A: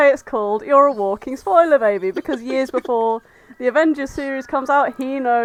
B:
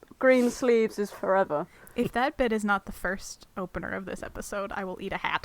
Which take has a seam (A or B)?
B